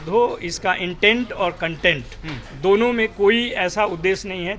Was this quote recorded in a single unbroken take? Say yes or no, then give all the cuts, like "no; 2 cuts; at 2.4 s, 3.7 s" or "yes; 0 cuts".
yes; 0 cuts